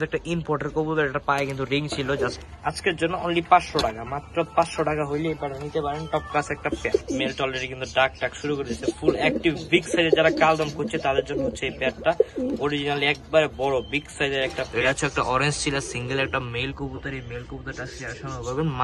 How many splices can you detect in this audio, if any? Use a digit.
3